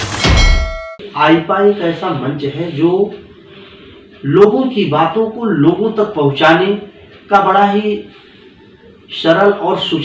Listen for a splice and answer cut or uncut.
cut